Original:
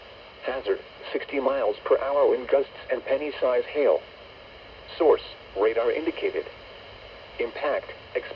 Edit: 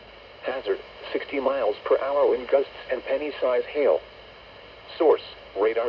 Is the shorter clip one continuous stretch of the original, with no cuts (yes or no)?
yes